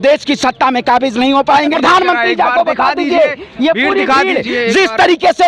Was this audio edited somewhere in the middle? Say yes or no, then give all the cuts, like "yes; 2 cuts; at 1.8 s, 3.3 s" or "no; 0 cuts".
yes; 1 cut; at 1.7 s